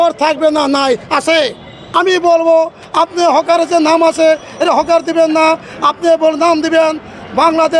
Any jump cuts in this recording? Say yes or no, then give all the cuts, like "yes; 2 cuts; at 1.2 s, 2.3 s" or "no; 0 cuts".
yes; 1 cut; at 1.8 s